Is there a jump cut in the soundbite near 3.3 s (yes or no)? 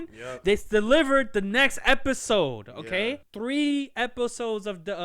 yes